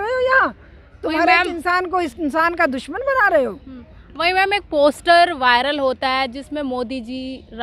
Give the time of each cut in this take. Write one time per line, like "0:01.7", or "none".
none

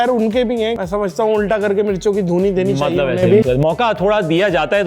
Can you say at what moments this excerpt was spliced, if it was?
0:00.7
0:03.4

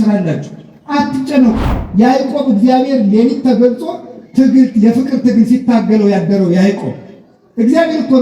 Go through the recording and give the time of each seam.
0:01.6

